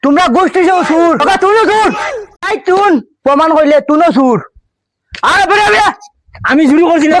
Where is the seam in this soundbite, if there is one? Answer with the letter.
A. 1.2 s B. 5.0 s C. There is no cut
A